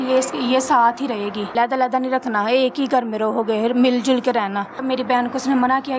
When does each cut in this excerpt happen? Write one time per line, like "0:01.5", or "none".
0:01.5
0:04.8